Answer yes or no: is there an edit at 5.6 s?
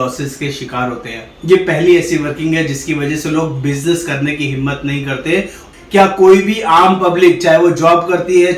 yes